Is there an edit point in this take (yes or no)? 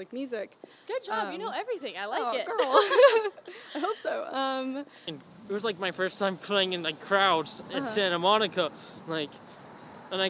yes